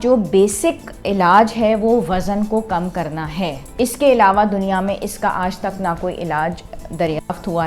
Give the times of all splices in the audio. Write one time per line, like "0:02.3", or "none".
0:03.6